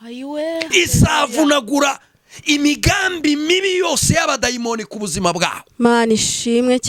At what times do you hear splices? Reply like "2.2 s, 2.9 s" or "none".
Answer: none